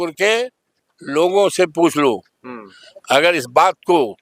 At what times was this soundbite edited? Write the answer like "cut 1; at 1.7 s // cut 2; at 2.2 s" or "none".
none